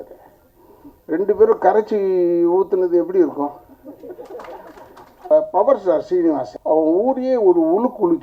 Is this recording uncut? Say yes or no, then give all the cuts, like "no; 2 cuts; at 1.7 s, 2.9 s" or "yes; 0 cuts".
no; 2 cuts; at 5.3 s, 6.5 s